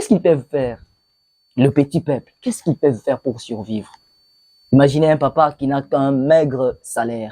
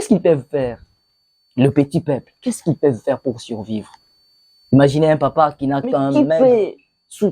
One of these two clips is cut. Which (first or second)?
second